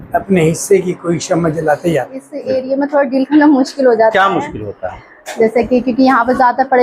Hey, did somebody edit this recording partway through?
yes; 1 cut; at 2.4 s

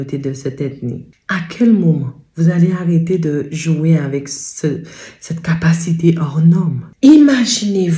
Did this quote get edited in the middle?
yes; 2 cuts; at 1.1 s, 6.8 s

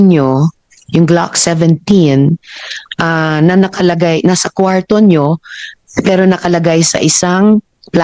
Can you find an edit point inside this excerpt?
no; 0 cuts

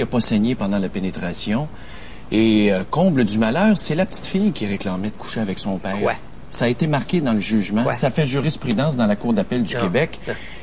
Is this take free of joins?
no; 1 cut; at 7.4 s

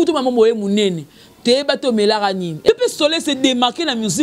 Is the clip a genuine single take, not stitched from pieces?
no; 1 cut; at 2.7 s

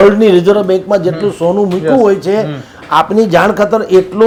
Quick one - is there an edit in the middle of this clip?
no; 0 cuts

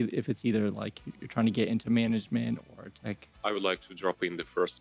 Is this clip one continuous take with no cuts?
no; 1 cut; at 3.3 s

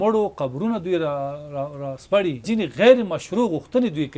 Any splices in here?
yes; 1 cut; at 2.4 s

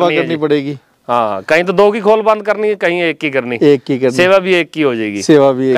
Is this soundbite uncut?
yes; 0 cuts

